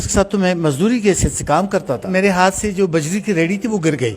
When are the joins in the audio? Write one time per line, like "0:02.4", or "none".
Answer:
0:02.1